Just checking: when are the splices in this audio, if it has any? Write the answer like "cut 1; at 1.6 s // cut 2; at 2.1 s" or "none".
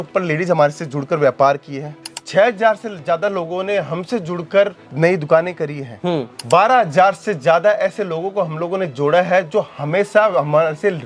cut 1; at 4.8 s // cut 2; at 6.3 s

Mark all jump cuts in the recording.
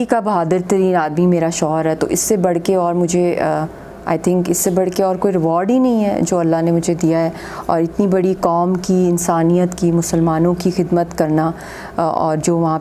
none

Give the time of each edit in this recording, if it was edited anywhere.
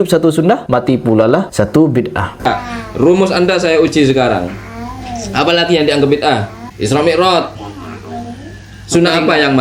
cut 1; at 2.4 s

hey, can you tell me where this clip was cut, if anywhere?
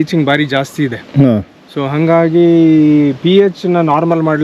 none

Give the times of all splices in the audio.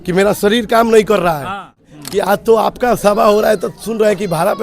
cut 1; at 1.8 s

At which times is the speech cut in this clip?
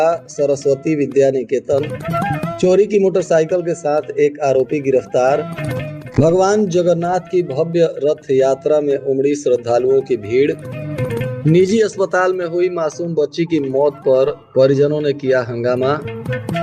none

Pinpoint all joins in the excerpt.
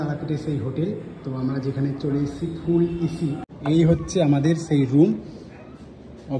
cut 1; at 3.5 s

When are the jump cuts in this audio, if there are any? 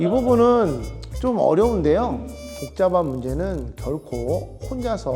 cut 1; at 2.5 s

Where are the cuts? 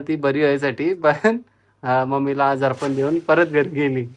none

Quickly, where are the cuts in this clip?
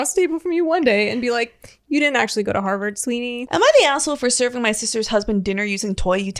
cut 1; at 3.4 s

